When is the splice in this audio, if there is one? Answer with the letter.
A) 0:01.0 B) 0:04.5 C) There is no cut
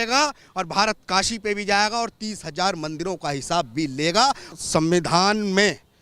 B